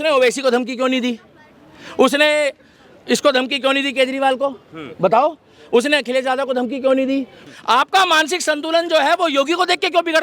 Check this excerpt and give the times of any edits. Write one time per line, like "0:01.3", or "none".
0:07.3